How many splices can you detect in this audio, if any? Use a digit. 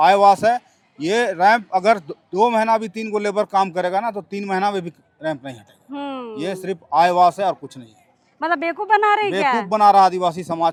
0